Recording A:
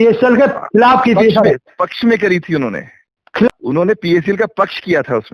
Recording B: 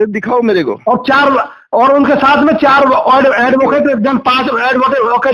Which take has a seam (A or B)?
A